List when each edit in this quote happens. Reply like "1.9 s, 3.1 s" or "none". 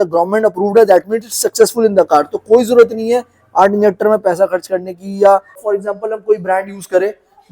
5.6 s

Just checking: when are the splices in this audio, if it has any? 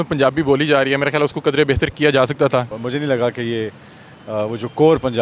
2.7 s

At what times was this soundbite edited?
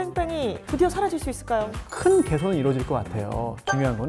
1.8 s

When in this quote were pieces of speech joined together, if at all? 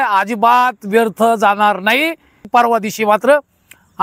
2.4 s

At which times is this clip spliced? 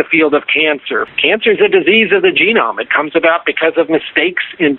1.1 s

